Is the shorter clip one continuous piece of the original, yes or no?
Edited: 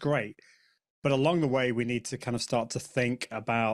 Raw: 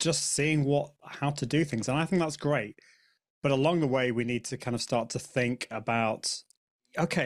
yes